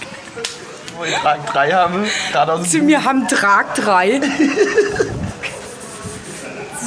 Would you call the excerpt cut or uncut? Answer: cut